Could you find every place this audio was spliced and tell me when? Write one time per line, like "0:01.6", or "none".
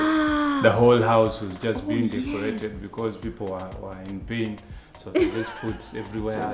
none